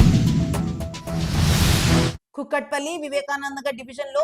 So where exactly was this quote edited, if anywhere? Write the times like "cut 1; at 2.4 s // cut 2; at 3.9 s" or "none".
none